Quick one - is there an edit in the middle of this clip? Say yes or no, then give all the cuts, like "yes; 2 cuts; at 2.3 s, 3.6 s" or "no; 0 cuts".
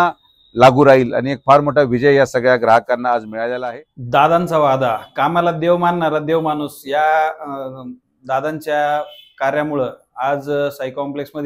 yes; 1 cut; at 3.5 s